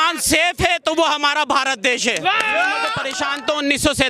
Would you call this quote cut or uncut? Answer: cut